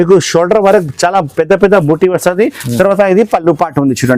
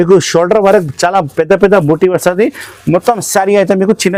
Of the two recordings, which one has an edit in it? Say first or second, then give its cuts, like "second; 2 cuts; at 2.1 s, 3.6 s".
first; 1 cut; at 2.6 s